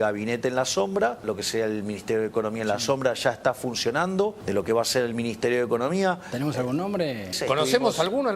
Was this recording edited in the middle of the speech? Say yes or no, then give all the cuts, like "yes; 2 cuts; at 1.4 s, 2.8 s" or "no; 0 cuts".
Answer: yes; 3 cuts; at 1.2 s, 4.4 s, 7.4 s